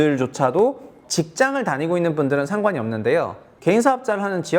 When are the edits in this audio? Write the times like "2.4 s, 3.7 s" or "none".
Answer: 1.0 s